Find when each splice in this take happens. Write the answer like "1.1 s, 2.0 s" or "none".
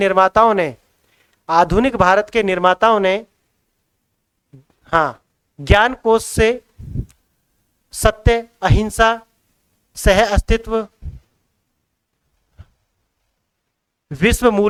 none